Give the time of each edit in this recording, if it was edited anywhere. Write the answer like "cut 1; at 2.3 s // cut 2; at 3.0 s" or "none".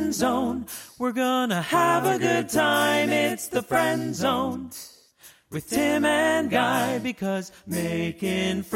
none